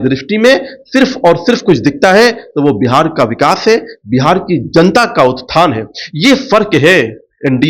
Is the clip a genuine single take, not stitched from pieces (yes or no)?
yes